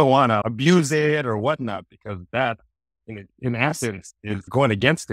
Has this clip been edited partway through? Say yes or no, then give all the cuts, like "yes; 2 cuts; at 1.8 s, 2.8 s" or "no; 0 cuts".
no; 0 cuts